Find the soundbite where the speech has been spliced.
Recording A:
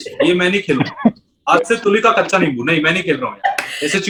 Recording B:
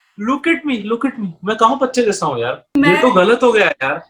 B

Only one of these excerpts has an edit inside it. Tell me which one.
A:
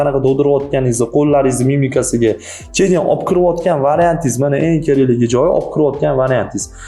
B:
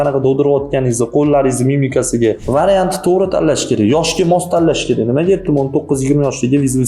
B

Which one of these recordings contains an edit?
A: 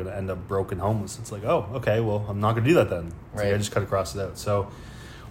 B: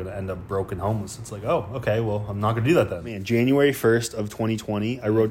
B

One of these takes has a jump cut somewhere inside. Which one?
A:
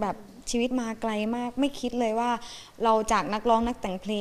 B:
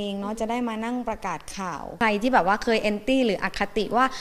B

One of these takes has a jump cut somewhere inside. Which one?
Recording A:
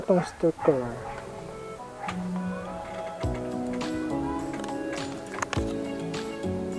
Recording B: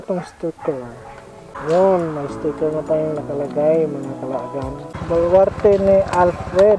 B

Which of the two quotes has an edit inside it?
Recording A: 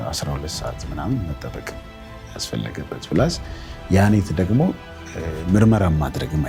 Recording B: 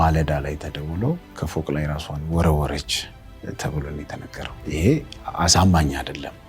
B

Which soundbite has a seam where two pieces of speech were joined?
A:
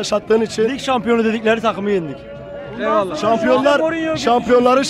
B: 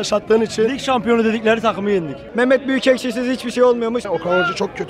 B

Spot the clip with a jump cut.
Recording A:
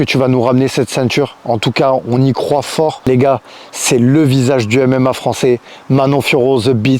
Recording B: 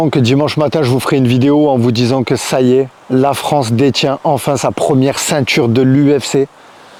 A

